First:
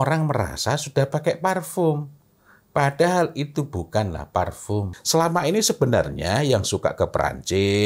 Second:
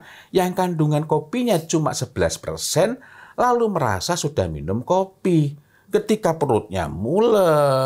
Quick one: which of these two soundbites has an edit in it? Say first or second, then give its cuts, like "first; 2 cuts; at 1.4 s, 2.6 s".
first; 1 cut; at 5.0 s